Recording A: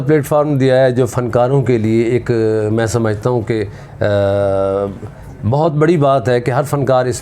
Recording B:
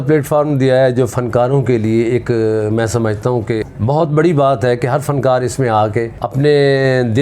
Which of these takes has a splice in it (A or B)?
B